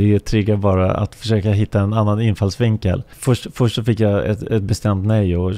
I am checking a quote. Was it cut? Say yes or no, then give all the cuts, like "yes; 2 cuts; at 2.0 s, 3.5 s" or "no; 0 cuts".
yes; 1 cut; at 3.1 s